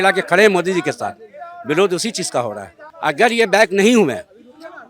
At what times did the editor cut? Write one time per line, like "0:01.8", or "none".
0:02.9